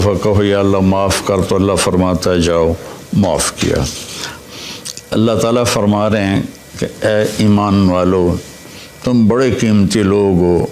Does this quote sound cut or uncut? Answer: cut